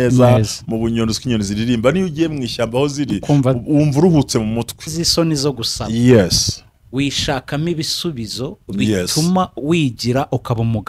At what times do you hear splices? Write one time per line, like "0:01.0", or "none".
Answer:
0:05.0